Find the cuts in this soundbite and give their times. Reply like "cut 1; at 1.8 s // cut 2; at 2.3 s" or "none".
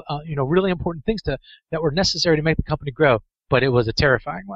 none

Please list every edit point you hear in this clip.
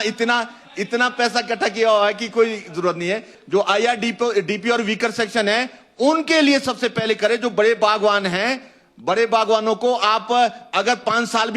cut 1; at 3.3 s

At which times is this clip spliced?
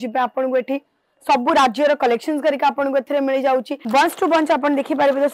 cut 1; at 3.8 s

